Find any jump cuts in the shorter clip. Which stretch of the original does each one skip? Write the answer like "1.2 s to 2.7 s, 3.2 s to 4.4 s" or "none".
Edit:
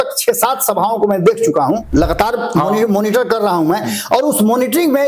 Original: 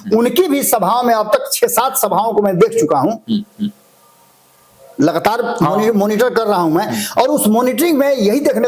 3.2 s to 4.9 s